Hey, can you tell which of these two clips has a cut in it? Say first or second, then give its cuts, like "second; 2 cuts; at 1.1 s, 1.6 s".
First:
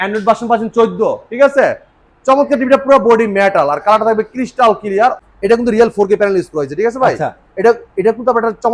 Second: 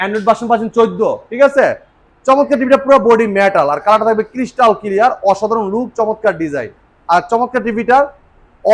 first; 1 cut; at 5.2 s